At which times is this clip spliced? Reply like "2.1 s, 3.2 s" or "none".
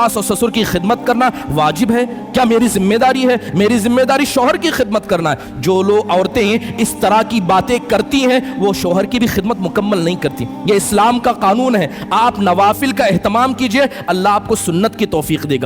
none